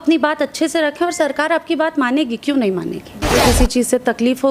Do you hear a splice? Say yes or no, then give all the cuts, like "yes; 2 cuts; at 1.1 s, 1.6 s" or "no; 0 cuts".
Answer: yes; 1 cut; at 3.3 s